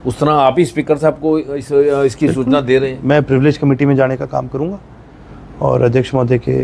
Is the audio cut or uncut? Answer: uncut